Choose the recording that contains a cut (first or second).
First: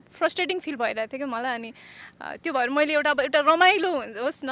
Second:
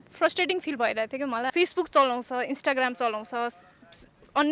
second